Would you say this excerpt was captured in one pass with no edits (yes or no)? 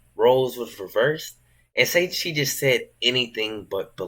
no